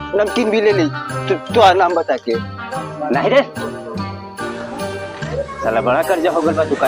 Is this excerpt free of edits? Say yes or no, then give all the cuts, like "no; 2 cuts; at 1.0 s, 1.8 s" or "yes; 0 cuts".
yes; 0 cuts